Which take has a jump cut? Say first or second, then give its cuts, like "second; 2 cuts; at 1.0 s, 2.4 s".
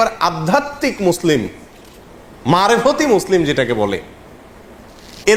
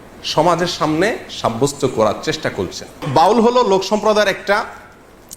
second; 1 cut; at 3.1 s